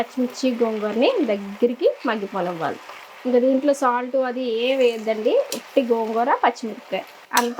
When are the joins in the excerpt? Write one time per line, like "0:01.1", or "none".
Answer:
none